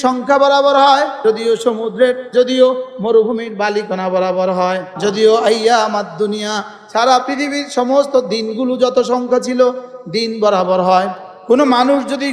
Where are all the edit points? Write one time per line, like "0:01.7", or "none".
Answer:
0:01.1
0:02.3
0:04.9
0:11.3